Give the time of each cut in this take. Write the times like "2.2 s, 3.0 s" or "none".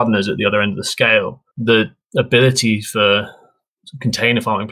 1.4 s, 2.0 s